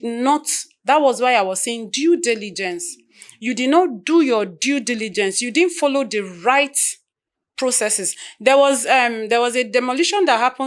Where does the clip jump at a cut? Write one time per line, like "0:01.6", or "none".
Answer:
none